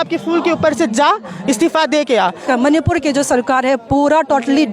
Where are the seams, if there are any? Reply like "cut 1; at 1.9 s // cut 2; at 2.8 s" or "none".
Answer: cut 1; at 2.5 s